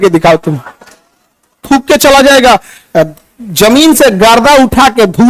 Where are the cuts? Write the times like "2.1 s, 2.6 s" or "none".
1.6 s